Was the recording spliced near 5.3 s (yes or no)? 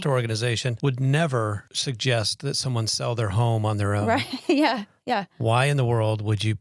no